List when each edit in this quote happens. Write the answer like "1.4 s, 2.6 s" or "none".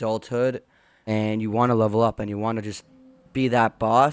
1.1 s